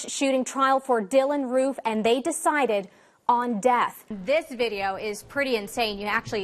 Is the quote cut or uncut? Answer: cut